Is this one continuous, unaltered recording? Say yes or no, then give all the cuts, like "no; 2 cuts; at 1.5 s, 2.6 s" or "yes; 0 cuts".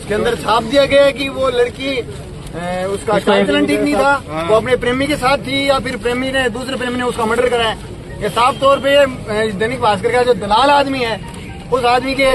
yes; 0 cuts